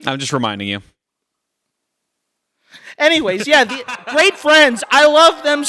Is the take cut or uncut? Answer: uncut